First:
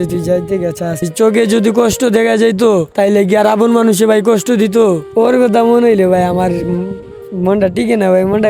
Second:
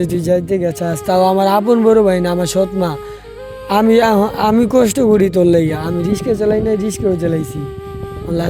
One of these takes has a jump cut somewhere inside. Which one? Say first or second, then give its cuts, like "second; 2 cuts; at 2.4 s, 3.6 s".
first; 3 cuts; at 1.0 s, 2.9 s, 5.2 s